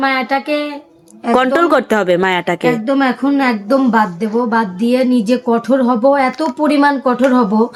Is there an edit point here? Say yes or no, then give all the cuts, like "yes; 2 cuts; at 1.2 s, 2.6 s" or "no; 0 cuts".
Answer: no; 0 cuts